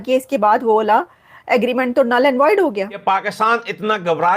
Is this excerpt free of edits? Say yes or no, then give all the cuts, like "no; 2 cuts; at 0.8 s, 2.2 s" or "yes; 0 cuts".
no; 1 cut; at 2.9 s